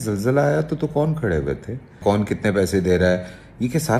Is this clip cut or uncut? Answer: cut